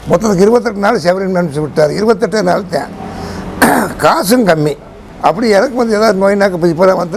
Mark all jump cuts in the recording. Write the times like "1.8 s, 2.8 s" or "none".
5.0 s